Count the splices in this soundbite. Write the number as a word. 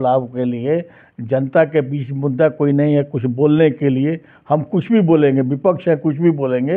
zero